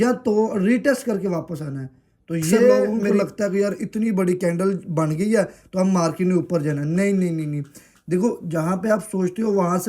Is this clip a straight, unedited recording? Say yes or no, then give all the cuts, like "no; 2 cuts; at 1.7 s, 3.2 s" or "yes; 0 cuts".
no; 1 cut; at 3.0 s